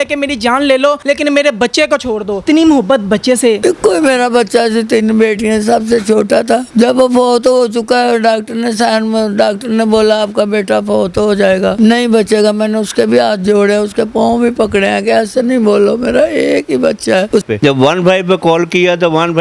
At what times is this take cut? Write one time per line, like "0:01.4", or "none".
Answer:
0:17.4